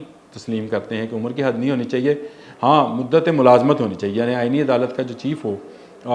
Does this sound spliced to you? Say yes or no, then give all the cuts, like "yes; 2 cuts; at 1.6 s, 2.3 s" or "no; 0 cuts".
no; 0 cuts